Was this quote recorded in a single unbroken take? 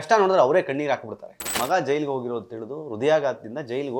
no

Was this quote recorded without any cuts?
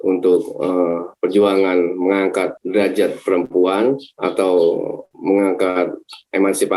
no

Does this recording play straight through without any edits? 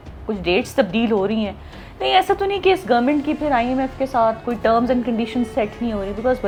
yes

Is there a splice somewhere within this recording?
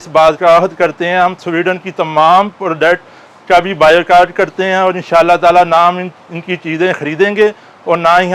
no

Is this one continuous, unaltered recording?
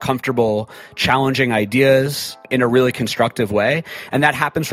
no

